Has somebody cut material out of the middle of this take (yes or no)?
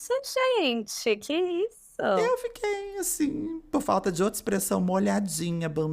yes